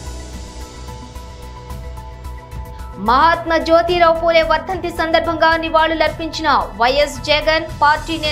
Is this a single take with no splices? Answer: yes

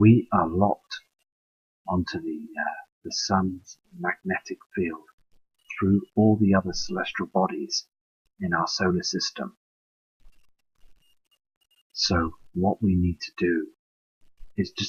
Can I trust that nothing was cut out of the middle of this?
yes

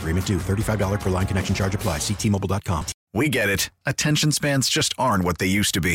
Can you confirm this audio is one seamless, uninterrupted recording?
no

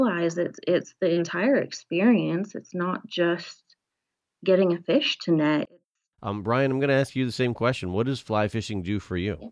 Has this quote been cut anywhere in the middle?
yes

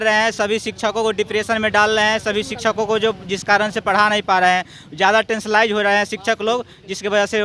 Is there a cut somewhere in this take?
no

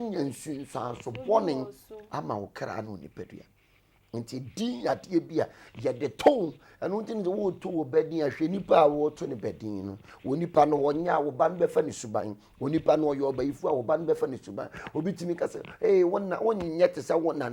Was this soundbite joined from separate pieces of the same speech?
no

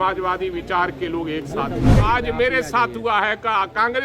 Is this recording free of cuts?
no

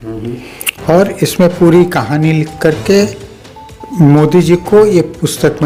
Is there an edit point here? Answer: no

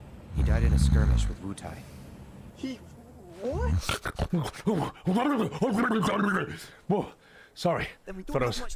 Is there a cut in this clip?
no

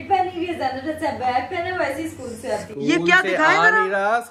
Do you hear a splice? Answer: no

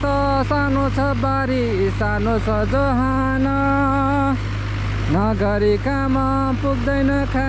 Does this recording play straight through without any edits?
yes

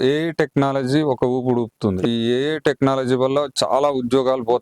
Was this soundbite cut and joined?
yes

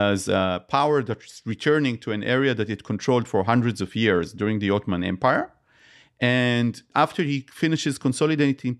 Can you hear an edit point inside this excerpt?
yes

